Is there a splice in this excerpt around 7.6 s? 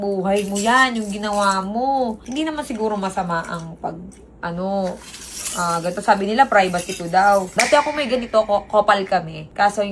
yes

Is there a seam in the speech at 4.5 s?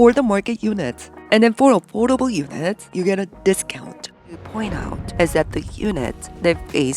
yes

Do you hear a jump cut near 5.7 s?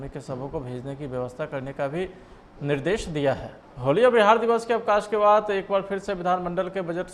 no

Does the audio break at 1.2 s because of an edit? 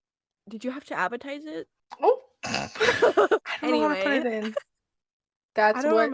no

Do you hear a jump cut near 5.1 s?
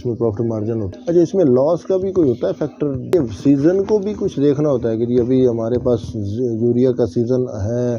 no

